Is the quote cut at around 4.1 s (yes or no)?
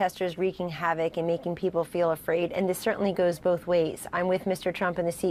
no